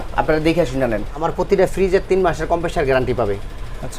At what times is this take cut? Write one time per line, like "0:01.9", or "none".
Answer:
0:01.2

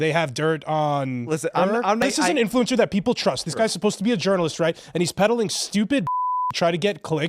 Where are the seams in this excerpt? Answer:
0:02.0
0:05.1

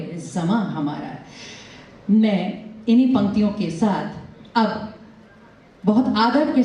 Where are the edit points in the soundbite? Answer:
none

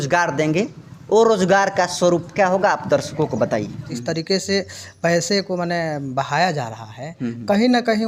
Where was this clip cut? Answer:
0:03.9

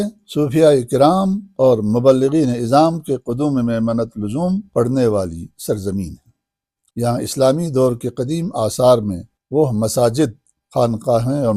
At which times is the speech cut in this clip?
none

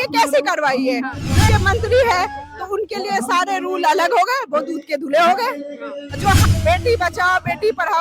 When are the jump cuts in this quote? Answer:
0:01.5
0:06.4

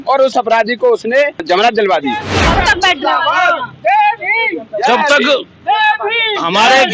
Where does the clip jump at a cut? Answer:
0:01.4
0:02.3

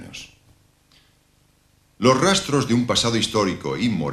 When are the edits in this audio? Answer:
0:01.6

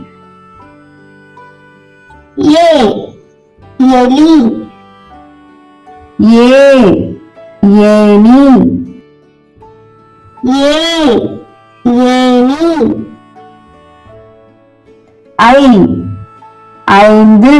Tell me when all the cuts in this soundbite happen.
none

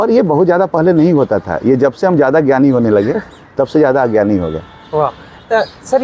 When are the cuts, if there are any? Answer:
none

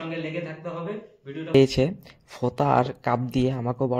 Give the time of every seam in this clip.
0:01.5

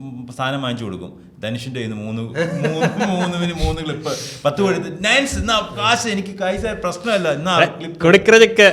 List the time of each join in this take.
none

